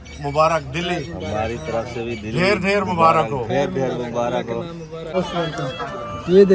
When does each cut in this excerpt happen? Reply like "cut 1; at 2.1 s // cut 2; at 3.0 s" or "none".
cut 1; at 5.2 s

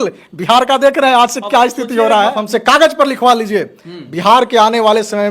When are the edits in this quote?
cut 1; at 2.4 s

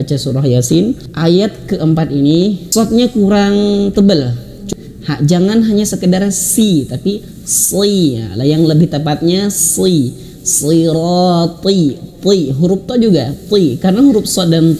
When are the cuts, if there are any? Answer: cut 1; at 1.1 s // cut 2; at 2.6 s // cut 3; at 4.5 s

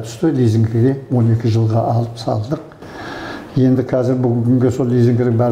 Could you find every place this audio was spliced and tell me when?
none

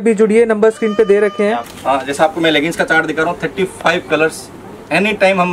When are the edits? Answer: cut 1; at 1.7 s

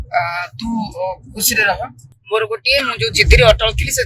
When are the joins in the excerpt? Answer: cut 1; at 2.2 s

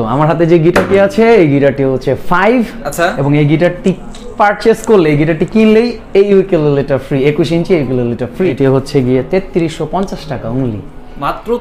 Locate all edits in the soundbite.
cut 1; at 8.5 s

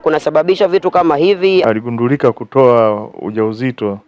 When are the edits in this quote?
cut 1; at 1.6 s

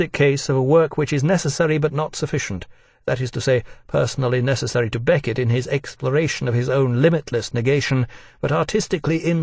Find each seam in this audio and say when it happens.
cut 1; at 1.7 s

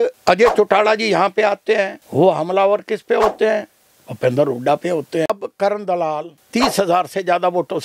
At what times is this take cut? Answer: cut 1; at 5.3 s

